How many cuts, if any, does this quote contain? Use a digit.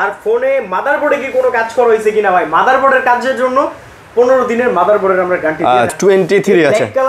1